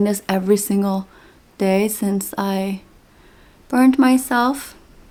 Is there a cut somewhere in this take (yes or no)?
no